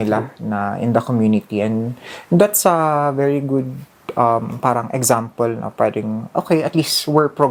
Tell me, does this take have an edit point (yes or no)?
no